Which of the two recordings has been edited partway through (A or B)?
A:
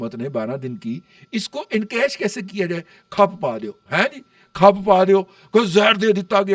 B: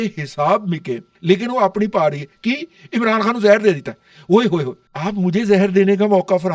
B